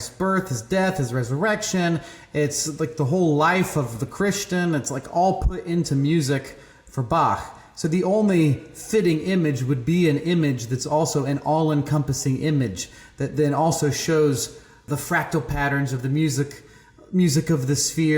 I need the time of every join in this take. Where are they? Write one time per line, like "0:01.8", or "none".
0:14.8